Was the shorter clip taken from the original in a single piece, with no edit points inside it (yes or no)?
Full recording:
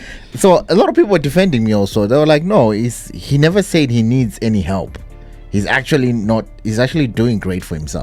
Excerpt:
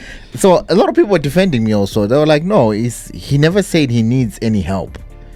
yes